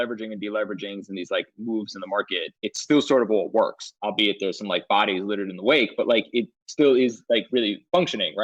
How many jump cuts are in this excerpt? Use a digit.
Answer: 2